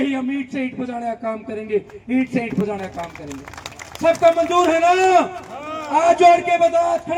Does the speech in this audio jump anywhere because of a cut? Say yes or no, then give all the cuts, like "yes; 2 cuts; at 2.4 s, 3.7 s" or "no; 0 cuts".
no; 0 cuts